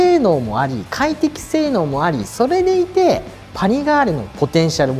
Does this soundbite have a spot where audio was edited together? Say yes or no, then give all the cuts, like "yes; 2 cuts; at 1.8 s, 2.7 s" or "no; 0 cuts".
no; 0 cuts